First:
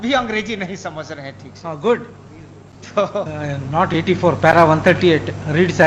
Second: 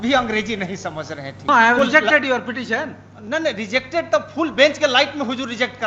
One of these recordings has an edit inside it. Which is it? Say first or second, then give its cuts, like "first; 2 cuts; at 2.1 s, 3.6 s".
second; 1 cut; at 1.5 s